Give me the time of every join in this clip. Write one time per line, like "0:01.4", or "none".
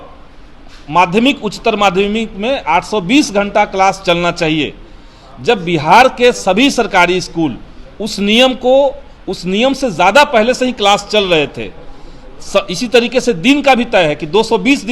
none